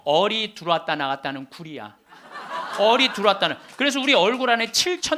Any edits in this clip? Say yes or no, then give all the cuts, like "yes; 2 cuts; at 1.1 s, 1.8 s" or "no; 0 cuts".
no; 0 cuts